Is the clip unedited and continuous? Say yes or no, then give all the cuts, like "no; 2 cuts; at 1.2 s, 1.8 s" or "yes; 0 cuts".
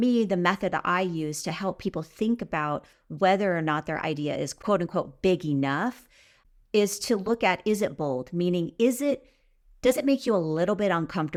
yes; 0 cuts